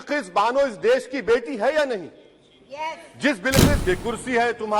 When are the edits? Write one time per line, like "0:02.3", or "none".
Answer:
0:03.8